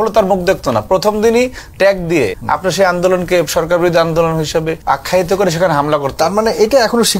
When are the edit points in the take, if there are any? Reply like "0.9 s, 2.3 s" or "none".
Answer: 2.4 s, 4.7 s